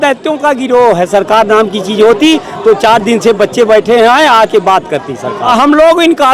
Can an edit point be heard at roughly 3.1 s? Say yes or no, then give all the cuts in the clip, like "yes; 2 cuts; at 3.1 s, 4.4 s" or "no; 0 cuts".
no; 1 cut; at 5.3 s